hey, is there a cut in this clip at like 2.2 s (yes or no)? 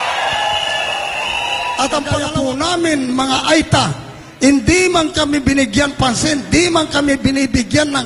yes